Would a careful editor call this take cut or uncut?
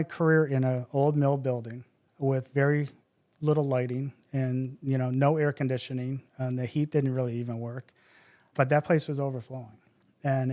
cut